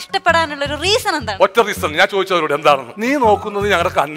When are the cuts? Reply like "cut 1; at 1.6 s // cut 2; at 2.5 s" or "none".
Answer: cut 1; at 2.9 s